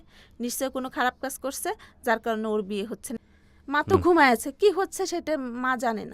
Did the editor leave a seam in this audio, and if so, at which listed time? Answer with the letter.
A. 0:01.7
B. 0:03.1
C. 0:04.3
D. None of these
B